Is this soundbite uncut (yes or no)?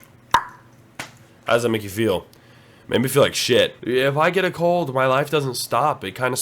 no